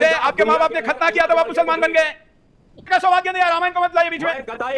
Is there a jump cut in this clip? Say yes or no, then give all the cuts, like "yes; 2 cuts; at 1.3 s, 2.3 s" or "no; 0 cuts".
yes; 1 cut; at 2.9 s